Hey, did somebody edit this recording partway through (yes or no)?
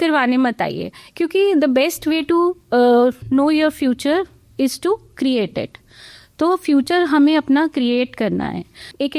no